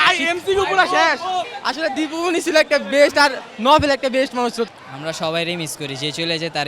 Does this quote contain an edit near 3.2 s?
no; 2 cuts; at 1.5 s, 4.7 s

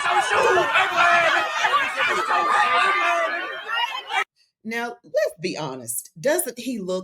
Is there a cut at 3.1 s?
no; 0 cuts

